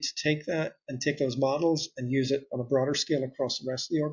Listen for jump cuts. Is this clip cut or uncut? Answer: uncut